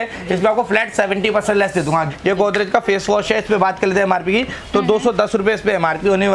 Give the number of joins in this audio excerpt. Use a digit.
1